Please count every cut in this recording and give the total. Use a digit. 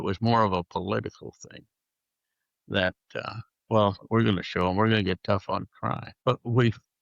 1